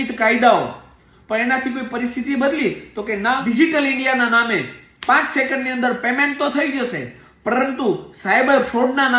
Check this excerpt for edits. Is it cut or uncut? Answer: cut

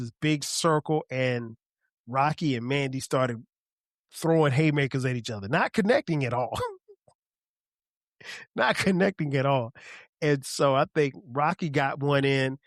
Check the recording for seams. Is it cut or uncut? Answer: uncut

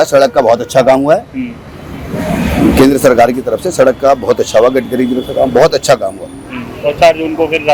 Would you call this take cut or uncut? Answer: uncut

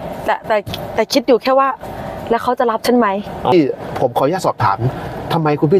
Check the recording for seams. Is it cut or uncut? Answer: cut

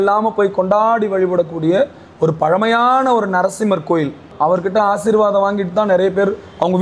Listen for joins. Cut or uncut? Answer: cut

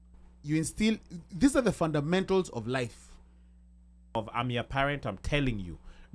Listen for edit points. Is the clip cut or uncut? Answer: cut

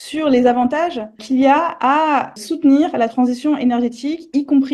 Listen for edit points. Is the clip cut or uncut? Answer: cut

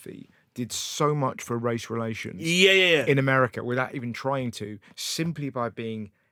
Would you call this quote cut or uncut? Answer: uncut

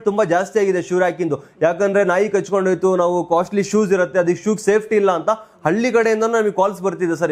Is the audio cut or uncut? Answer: uncut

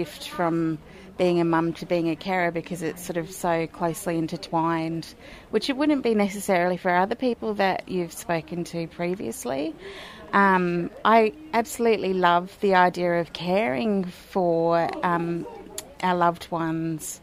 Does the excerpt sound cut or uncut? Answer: uncut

